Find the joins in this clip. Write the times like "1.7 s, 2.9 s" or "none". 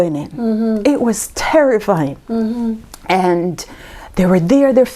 none